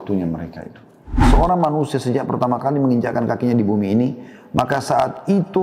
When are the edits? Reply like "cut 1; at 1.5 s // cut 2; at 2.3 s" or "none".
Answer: cut 1; at 1.3 s